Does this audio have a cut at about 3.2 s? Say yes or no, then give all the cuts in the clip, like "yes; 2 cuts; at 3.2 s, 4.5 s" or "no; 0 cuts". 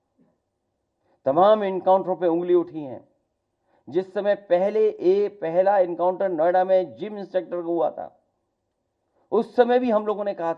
no; 0 cuts